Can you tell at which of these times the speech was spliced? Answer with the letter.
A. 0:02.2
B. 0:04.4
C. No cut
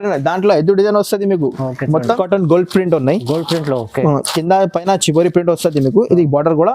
A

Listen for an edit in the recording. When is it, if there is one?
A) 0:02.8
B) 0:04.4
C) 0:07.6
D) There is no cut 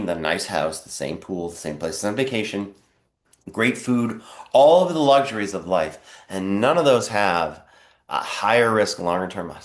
D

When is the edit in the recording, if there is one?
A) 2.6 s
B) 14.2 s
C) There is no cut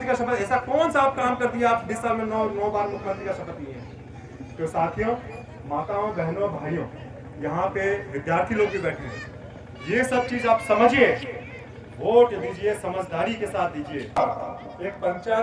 B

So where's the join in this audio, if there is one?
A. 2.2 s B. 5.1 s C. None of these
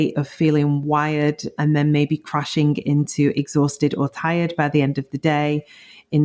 C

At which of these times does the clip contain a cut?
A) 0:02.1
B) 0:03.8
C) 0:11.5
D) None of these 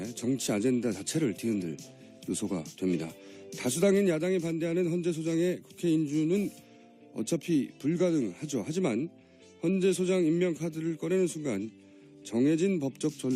D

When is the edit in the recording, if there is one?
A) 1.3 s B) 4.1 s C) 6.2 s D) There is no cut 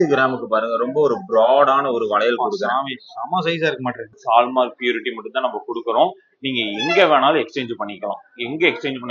B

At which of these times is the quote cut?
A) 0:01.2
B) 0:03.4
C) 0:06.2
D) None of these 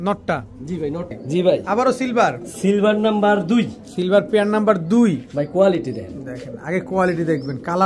A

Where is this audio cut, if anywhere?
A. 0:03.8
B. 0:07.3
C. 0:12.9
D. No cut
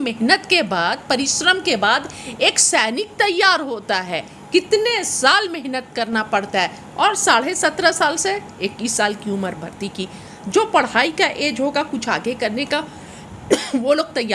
D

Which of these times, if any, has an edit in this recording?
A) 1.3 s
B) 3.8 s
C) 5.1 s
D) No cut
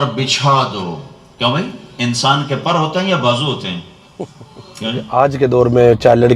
C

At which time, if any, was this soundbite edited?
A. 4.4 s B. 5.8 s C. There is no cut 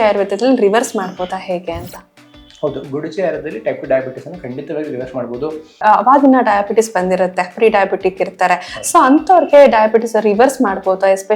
B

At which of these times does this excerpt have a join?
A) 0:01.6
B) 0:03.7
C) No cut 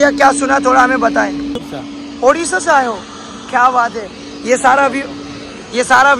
A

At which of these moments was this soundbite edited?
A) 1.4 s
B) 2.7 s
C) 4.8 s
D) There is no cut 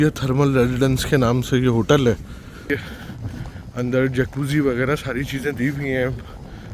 B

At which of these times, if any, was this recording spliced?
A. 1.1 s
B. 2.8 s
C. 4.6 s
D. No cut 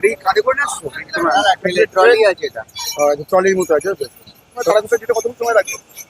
C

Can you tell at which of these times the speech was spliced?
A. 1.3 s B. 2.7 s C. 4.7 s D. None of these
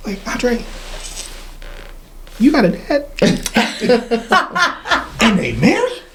D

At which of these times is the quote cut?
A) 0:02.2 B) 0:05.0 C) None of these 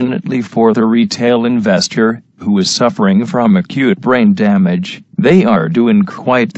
B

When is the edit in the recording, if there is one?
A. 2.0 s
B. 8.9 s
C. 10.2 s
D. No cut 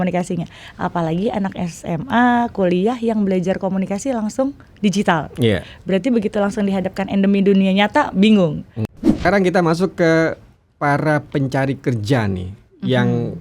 B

